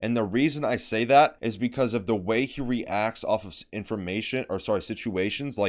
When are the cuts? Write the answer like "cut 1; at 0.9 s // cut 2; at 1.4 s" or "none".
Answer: cut 1; at 1.4 s